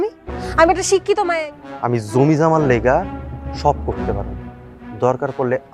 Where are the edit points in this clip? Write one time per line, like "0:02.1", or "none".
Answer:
0:01.3